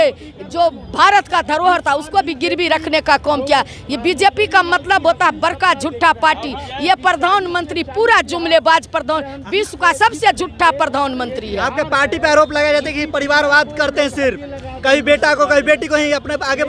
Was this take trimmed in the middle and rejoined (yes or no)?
no